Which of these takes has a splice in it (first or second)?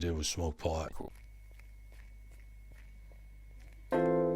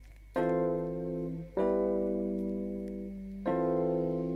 first